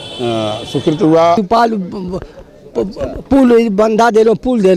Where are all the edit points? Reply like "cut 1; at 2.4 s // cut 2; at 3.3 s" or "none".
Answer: cut 1; at 1.4 s